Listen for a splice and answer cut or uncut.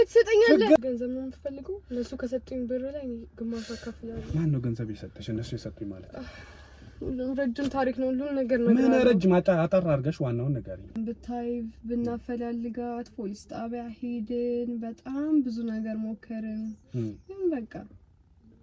cut